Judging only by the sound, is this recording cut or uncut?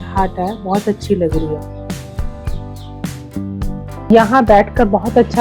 cut